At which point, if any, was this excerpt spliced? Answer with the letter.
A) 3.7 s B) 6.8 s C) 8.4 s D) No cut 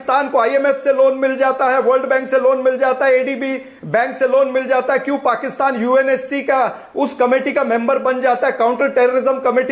D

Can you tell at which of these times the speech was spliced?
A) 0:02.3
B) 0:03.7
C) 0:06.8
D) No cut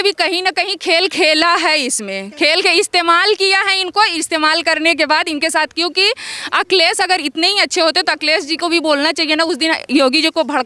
D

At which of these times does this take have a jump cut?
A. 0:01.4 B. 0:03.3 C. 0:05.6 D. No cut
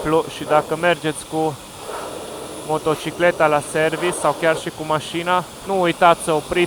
C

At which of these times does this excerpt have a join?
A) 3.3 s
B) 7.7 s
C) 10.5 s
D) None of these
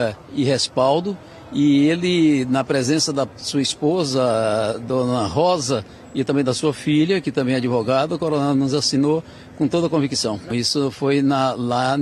C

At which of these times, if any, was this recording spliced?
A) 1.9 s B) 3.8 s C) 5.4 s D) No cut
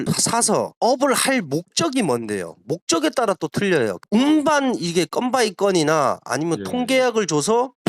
D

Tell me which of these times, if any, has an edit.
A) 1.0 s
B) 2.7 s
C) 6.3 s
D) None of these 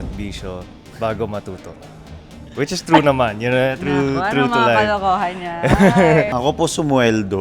C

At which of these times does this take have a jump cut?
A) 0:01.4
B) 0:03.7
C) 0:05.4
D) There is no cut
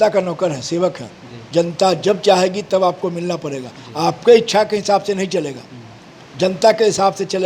A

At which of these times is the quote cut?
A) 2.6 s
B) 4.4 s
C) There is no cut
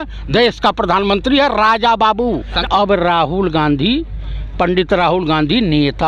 A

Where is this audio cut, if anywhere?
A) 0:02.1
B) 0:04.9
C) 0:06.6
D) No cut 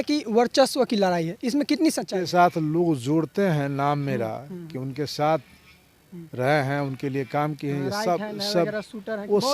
A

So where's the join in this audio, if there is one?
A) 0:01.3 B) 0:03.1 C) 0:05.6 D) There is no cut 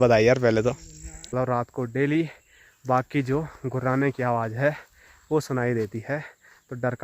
A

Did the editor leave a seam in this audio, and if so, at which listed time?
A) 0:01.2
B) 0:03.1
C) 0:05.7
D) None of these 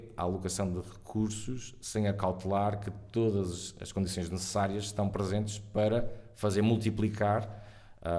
D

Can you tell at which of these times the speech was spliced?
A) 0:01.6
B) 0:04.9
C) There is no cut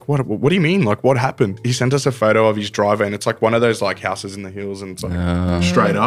A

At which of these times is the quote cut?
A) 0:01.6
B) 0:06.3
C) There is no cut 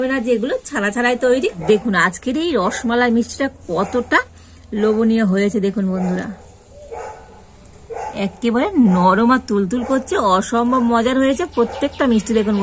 A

